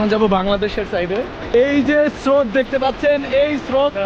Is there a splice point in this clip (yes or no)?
no